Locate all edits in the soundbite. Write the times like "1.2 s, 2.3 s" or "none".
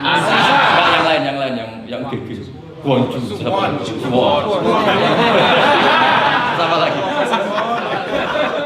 none